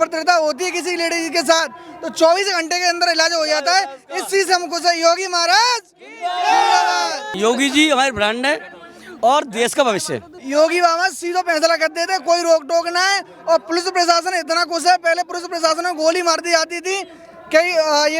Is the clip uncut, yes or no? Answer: no